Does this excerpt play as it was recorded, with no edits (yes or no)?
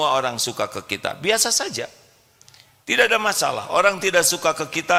yes